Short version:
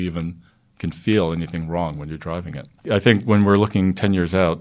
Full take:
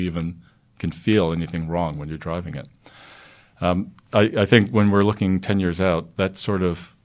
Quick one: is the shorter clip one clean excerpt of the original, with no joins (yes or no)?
no